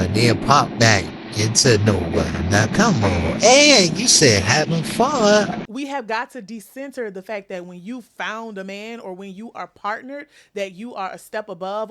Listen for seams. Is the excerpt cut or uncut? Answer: cut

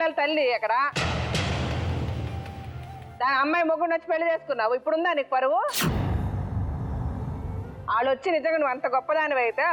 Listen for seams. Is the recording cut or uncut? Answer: uncut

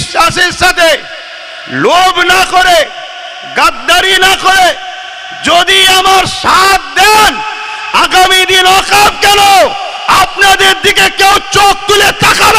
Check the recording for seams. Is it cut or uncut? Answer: uncut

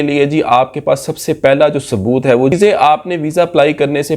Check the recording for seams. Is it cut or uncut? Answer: cut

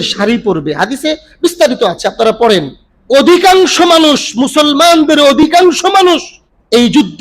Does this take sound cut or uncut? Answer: uncut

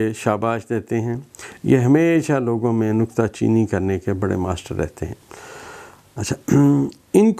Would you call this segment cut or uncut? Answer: uncut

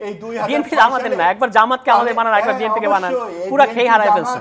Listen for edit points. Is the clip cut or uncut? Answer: uncut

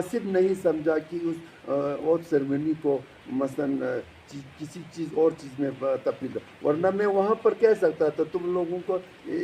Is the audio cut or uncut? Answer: uncut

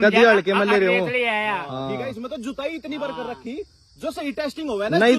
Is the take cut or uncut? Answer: uncut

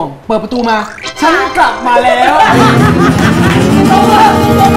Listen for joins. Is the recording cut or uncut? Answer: uncut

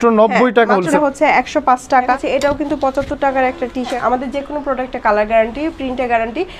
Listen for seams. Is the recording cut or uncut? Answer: cut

